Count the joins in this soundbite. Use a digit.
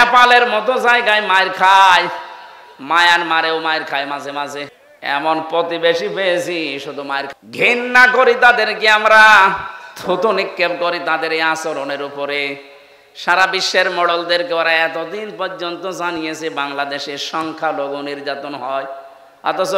2